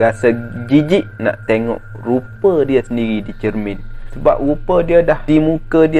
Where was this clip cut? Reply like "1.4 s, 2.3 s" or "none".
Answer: 4.0 s, 5.2 s